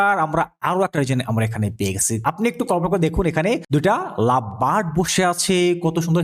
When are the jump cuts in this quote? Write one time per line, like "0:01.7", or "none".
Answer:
0:02.2
0:03.6